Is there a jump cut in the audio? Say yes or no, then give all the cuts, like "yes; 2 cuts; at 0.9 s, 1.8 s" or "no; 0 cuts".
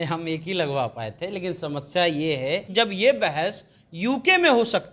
yes; 1 cut; at 2.7 s